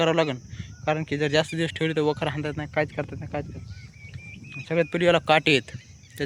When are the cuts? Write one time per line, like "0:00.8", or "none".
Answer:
none